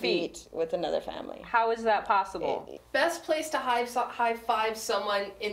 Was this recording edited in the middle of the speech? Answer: yes; 1 cut; at 2.8 s

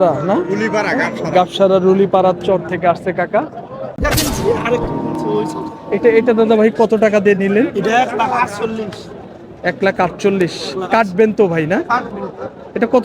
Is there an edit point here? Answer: yes; 1 cut; at 4.0 s

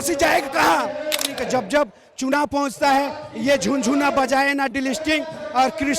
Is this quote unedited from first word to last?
no; 1 cut; at 1.4 s

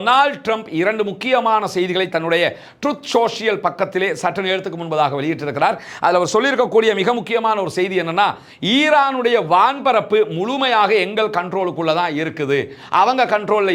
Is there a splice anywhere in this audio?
no; 0 cuts

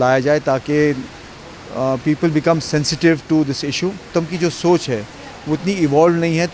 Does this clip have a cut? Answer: yes; 1 cut; at 4.0 s

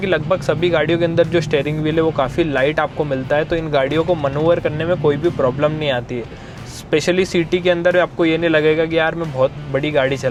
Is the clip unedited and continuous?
yes; 0 cuts

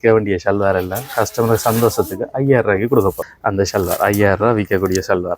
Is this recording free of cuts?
no; 1 cut; at 3.2 s

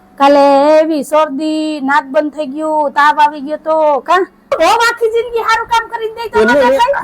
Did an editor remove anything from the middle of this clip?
yes; 1 cut; at 4.4 s

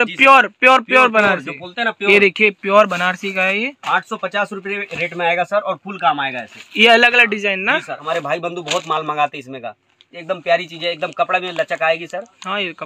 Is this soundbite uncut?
no; 1 cut; at 8.0 s

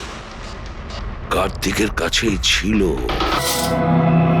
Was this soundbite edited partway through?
yes; 1 cut; at 3.4 s

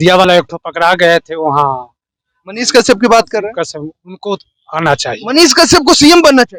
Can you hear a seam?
no; 0 cuts

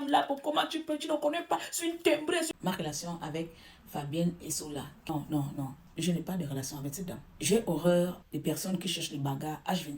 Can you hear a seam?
yes; 5 cuts; at 2.5 s, 5.1 s, 5.8 s, 7.3 s, 8.2 s

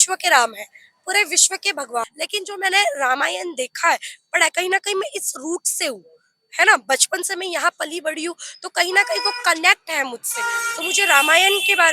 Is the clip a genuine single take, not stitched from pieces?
no; 1 cut; at 2.0 s

